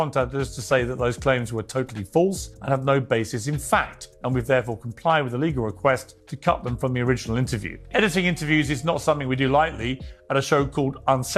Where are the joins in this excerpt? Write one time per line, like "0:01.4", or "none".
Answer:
none